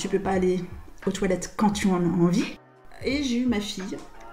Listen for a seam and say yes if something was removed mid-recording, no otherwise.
yes